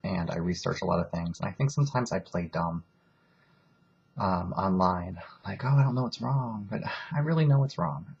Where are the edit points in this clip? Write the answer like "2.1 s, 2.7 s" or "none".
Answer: none